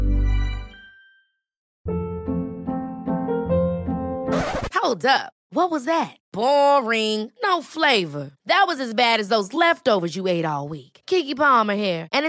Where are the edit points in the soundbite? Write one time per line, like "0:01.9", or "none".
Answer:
0:01.7